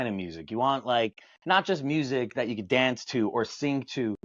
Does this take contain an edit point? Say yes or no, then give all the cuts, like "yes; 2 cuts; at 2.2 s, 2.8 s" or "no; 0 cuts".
no; 0 cuts